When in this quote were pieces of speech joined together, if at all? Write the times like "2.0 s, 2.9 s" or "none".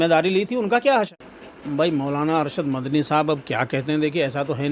1.1 s